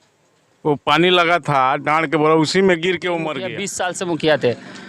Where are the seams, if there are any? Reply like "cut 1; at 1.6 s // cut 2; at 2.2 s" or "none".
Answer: cut 1; at 3.7 s